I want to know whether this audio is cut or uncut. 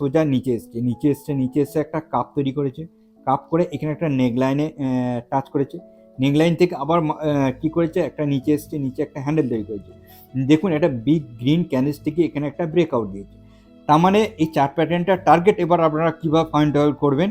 uncut